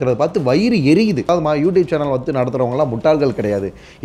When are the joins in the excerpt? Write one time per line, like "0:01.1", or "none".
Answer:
0:01.3